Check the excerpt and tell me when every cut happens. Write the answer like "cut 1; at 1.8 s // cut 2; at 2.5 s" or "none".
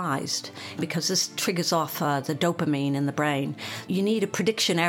cut 1; at 0.8 s // cut 2; at 3.8 s